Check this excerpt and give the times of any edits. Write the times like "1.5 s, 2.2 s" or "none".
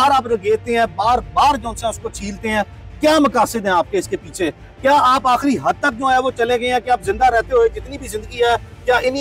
none